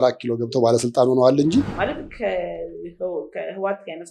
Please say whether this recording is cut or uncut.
cut